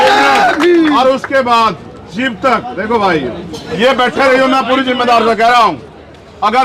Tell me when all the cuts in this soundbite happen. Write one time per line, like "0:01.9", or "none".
0:03.6